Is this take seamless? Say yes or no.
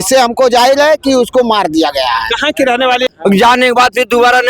no